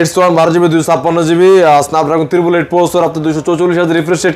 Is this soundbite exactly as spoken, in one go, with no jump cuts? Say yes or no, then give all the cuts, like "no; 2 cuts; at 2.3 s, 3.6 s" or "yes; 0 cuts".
yes; 0 cuts